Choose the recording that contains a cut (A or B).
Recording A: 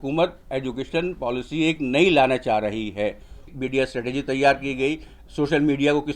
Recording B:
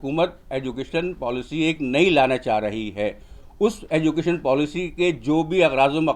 A